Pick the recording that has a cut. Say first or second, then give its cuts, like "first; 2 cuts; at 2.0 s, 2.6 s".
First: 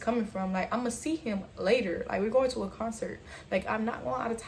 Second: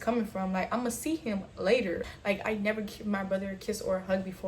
second; 1 cut; at 2.0 s